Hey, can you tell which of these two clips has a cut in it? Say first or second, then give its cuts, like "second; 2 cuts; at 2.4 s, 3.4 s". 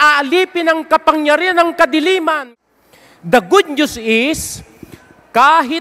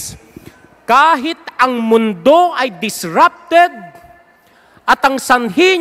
first; 1 cut; at 2.5 s